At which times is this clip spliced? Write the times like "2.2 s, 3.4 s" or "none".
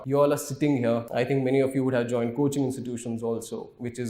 1.1 s

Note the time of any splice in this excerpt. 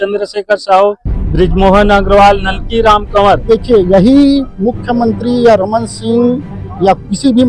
3.5 s

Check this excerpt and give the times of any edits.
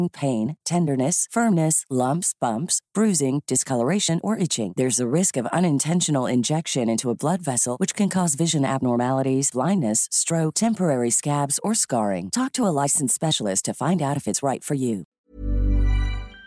15.2 s

